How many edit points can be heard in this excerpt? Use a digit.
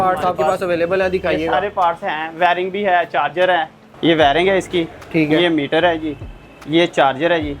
1